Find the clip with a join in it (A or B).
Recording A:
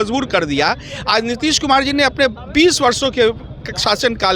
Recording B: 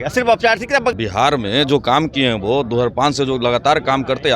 B